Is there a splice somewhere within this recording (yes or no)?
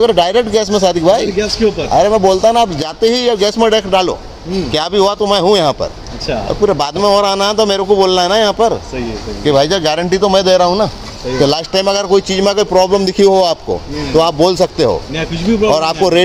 no